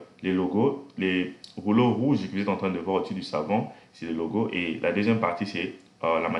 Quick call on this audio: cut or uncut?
uncut